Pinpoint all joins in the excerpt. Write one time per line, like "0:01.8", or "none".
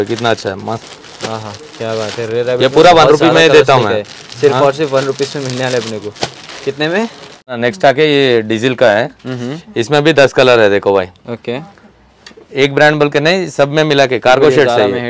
0:07.4